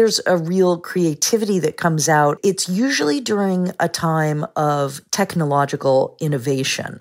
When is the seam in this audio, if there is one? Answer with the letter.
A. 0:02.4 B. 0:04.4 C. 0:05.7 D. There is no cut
A